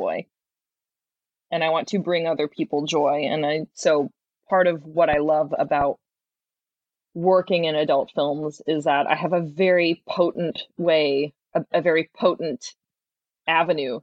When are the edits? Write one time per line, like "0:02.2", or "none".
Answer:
0:12.7